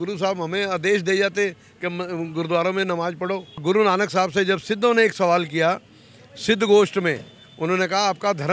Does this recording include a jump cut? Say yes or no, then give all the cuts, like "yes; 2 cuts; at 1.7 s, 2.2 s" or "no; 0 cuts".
yes; 1 cut; at 3.6 s